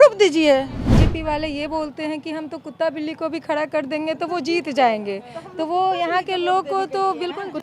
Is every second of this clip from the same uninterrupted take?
no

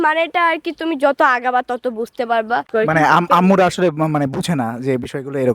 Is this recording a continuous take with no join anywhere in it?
no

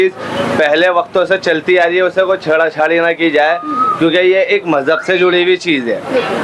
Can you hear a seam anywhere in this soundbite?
no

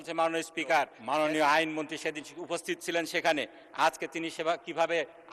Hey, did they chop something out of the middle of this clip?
yes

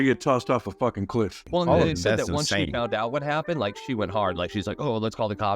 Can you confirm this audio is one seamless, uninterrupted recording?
no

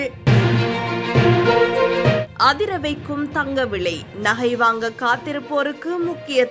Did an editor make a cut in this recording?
no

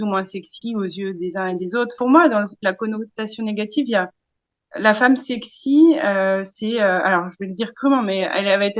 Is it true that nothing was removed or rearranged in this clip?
no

